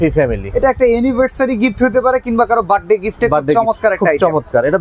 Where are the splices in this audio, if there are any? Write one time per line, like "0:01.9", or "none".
none

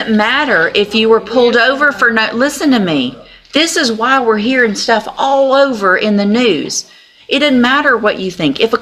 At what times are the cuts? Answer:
none

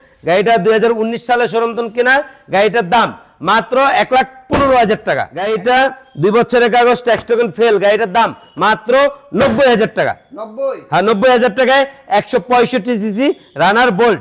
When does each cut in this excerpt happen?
0:05.4

